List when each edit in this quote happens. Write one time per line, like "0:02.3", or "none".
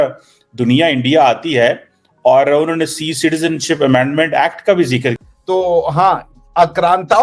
0:05.2